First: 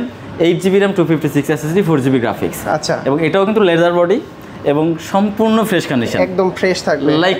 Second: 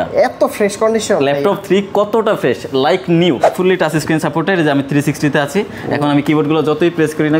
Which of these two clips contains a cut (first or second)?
second